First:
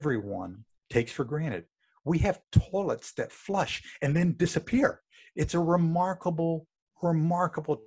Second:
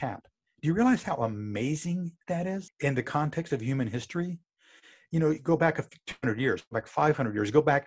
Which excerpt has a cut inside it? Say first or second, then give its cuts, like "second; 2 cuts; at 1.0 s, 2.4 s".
second; 1 cut; at 2.7 s